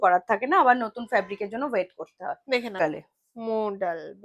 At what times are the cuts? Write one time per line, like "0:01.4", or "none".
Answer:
0:02.8